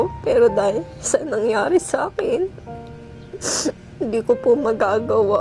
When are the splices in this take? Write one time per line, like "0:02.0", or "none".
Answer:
none

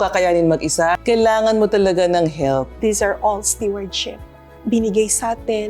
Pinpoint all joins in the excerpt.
0:00.9
0:02.7

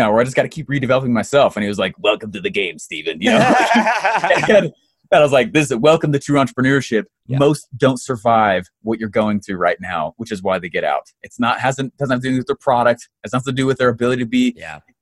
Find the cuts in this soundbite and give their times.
none

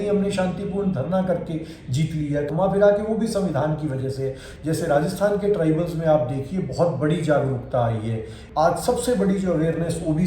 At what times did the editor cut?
0:02.5
0:04.5
0:08.4

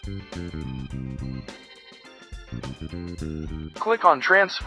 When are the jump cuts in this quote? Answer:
0:03.7

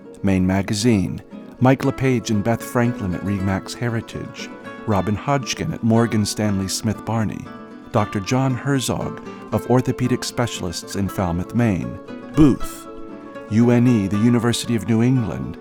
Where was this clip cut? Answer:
none

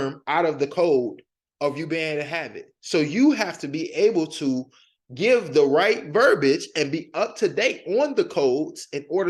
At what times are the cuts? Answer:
none

